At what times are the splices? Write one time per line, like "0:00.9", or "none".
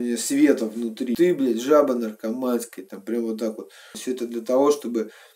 0:01.1
0:04.0